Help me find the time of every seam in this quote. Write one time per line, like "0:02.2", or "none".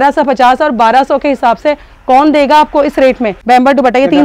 0:03.3

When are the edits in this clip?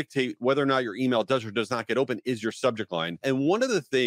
0:03.1

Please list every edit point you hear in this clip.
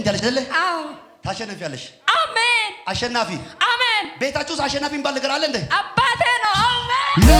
none

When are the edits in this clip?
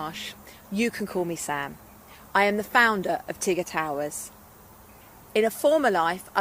none

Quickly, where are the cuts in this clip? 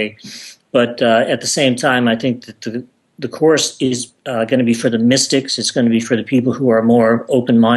0:01.8

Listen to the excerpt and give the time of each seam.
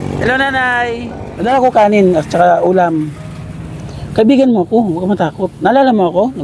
0:01.4

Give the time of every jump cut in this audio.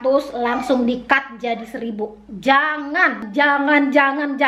0:03.2

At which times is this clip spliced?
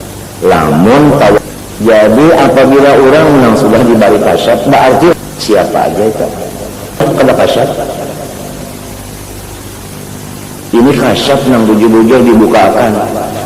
0:01.4
0:05.1
0:07.0

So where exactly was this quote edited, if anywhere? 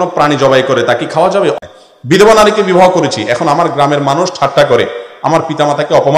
0:01.5

